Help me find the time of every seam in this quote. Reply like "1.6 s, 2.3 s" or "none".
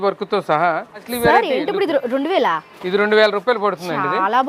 1.1 s